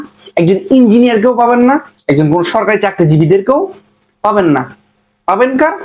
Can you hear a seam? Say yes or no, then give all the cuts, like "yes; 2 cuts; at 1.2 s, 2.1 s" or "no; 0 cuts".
yes; 1 cut; at 1.9 s